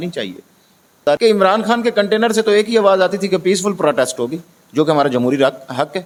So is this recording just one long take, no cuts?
yes; 0 cuts

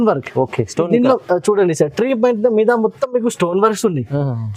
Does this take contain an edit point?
no; 0 cuts

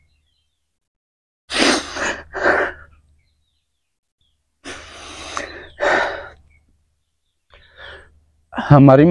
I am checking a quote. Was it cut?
no; 0 cuts

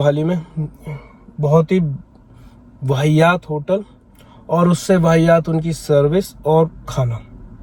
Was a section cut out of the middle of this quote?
no; 0 cuts

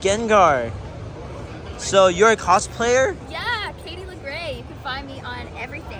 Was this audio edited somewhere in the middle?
no; 0 cuts

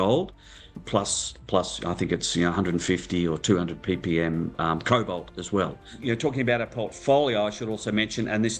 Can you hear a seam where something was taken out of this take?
yes; 2 cuts; at 0.8 s, 6.0 s

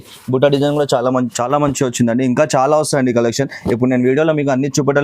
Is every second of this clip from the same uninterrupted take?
no; 1 cut; at 1.3 s

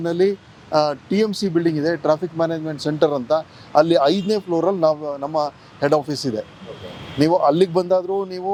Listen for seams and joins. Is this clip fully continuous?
yes; 0 cuts

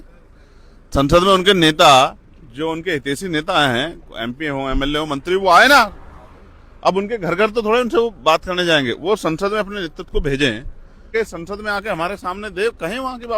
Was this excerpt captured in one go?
no; 1 cut; at 11.1 s

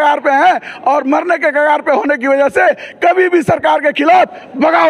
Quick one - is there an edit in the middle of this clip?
no; 0 cuts

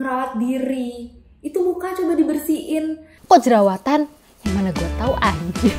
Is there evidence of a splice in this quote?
no; 0 cuts

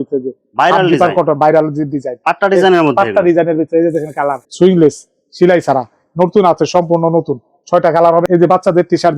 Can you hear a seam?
yes; 2 cuts; at 4.4 s, 8.3 s

